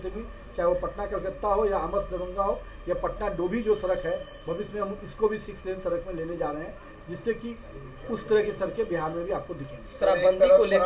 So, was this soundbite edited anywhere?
no; 0 cuts

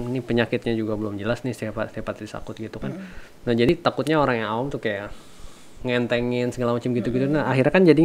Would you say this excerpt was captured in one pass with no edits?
no; 1 cut; at 3.7 s

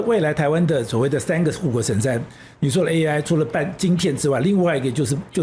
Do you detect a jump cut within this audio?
no; 0 cuts

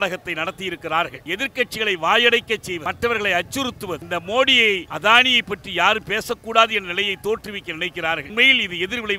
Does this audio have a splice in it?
yes; 5 cuts; at 1.2 s, 2.8 s, 4.0 s, 4.9 s, 8.3 s

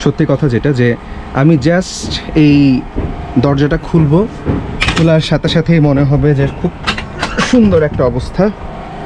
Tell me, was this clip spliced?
no; 0 cuts

